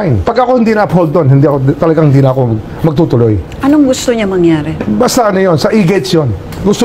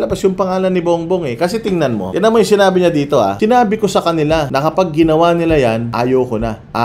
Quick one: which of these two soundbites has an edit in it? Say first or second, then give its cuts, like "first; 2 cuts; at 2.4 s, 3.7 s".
second; 4 cuts; at 2.1 s, 3.3 s, 4.5 s, 5.9 s